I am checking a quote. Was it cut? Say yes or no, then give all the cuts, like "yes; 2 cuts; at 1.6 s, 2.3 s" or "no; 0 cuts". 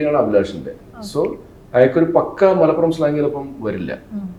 no; 0 cuts